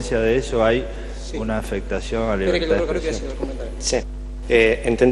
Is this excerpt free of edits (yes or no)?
yes